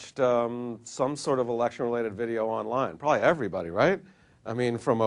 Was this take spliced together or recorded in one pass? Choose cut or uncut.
uncut